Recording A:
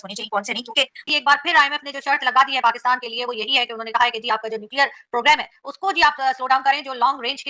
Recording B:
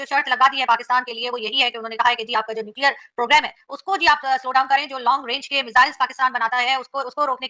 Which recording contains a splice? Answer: A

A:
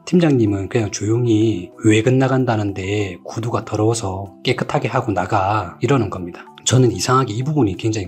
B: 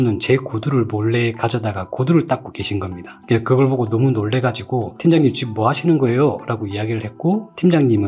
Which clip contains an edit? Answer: A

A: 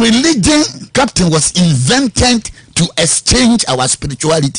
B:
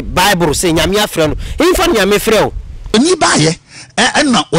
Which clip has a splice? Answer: B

